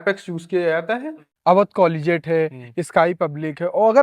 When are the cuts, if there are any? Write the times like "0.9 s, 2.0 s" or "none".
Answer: 1.3 s